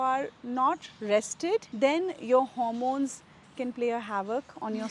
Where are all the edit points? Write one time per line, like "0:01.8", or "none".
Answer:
0:01.7